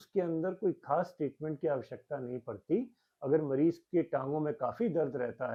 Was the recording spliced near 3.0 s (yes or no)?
no